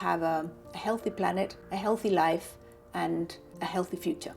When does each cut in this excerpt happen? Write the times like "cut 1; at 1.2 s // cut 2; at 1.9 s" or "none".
cut 1; at 1.6 s // cut 2; at 3.4 s